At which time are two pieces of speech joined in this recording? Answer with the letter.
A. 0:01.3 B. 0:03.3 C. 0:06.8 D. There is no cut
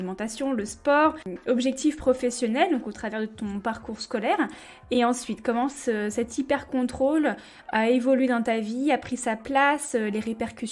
A